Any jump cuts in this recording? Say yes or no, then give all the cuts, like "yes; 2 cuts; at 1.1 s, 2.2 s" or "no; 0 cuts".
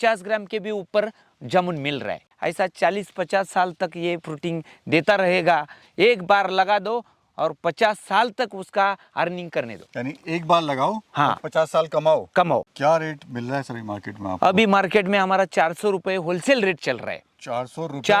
yes; 2 cuts; at 2.3 s, 12.7 s